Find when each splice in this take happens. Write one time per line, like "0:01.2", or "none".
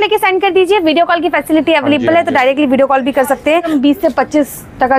0:03.7